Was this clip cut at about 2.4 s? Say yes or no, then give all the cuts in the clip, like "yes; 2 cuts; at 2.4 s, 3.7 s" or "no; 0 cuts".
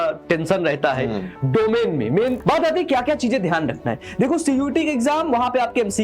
yes; 1 cut; at 2.4 s